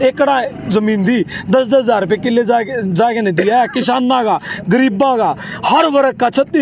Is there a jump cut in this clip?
no; 0 cuts

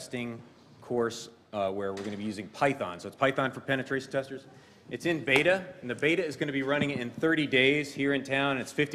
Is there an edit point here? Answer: yes; 1 cut; at 4.3 s

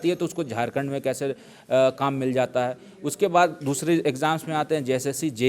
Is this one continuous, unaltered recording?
yes; 0 cuts

